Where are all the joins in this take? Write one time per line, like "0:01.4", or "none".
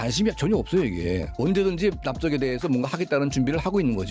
0:01.3